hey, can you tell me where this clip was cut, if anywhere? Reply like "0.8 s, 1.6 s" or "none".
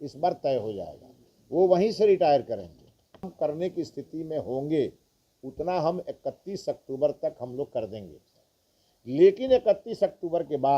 3.3 s